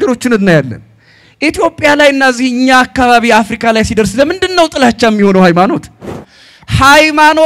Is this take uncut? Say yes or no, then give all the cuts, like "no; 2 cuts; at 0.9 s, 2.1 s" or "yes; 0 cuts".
no; 1 cut; at 6.1 s